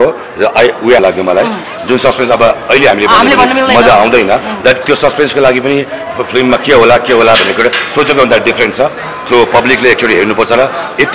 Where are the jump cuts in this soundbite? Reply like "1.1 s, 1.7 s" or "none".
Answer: 1.0 s